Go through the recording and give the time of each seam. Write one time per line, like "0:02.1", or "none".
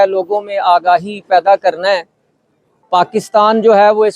0:02.7